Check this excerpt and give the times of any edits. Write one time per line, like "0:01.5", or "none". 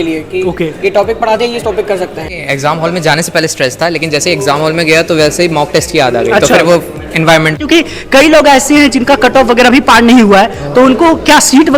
0:02.4
0:07.6